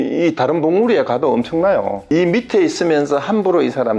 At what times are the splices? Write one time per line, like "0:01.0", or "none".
0:02.0